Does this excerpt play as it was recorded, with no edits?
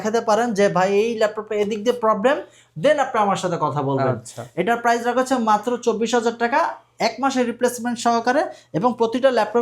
yes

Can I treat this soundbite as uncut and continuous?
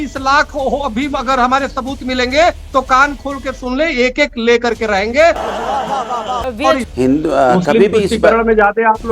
no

